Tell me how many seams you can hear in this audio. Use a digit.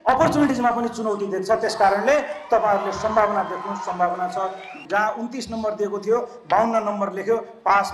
1